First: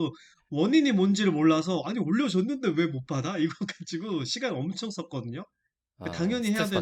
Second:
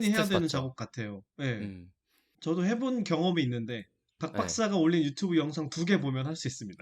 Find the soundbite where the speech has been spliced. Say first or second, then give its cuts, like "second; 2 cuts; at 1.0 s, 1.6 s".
second; 1 cut; at 2.3 s